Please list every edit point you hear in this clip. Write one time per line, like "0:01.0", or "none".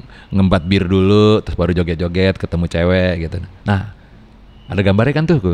none